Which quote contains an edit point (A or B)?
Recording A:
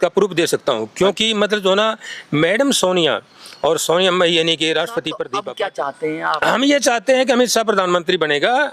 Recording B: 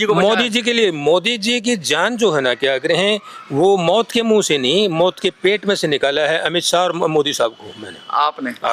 A